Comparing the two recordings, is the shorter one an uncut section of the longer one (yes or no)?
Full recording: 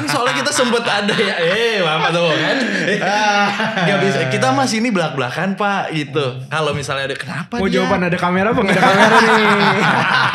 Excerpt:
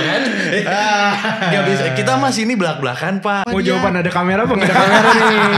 no